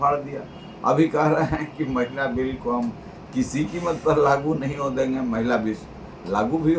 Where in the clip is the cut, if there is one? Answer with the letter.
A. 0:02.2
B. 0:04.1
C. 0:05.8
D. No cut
D